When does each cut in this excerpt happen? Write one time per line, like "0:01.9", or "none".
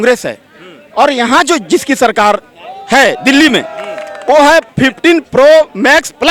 0:04.7